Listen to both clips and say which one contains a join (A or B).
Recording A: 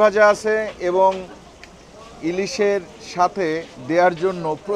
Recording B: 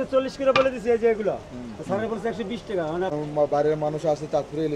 B